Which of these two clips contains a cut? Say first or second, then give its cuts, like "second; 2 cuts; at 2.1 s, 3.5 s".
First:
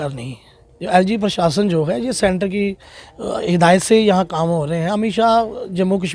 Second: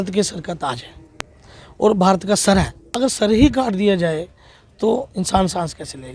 second; 1 cut; at 2.8 s